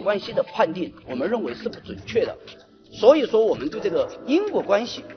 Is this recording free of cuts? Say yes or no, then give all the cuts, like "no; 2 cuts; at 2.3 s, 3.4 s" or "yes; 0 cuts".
yes; 0 cuts